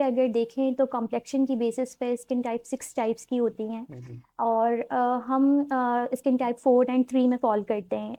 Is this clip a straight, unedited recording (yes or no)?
yes